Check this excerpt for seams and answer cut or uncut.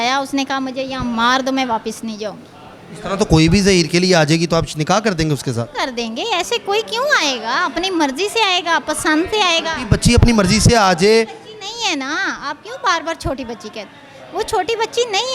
uncut